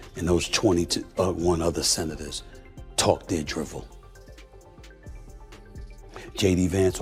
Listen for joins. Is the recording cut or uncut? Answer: uncut